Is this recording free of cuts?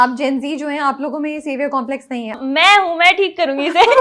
no; 1 cut; at 2.4 s

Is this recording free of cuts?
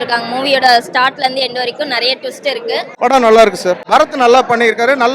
no; 2 cuts; at 2.9 s, 3.8 s

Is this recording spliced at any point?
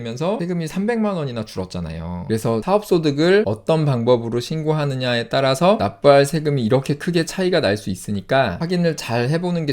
yes; 1 cut; at 3.5 s

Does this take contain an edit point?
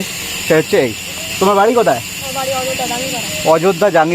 no; 0 cuts

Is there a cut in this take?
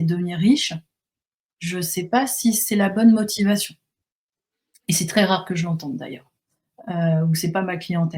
no; 0 cuts

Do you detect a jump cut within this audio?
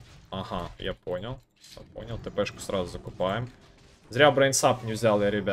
no; 0 cuts

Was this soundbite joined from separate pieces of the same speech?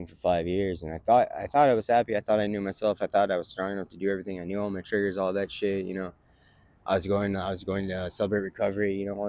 no; 0 cuts

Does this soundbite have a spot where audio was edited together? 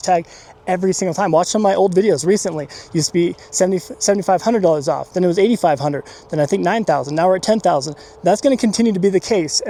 no; 0 cuts

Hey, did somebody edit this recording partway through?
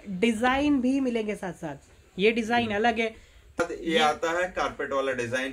yes; 1 cut; at 3.6 s

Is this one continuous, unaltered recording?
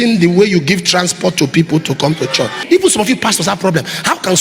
no; 1 cut; at 2.6 s

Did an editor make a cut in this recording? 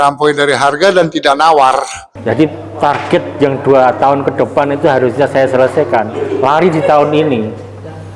yes; 1 cut; at 2.0 s

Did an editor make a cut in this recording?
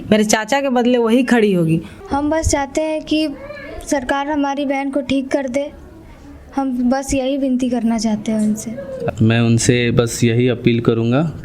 yes; 2 cuts; at 2.0 s, 9.0 s

